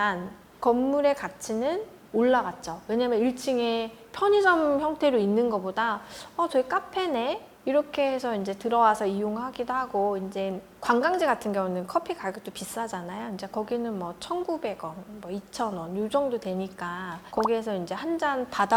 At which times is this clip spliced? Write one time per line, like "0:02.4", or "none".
none